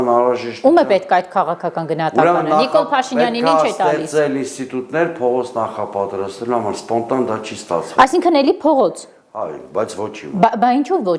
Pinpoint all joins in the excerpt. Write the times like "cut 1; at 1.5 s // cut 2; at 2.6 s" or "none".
none